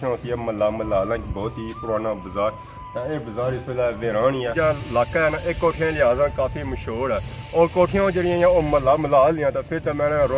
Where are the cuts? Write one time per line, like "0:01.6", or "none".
0:04.5